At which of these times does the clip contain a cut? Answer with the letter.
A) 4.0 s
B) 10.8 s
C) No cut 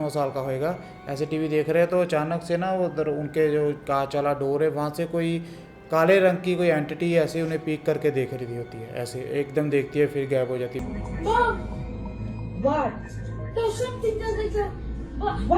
B